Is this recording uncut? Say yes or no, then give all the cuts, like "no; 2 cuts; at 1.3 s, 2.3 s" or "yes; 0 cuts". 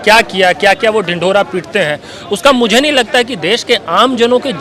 yes; 0 cuts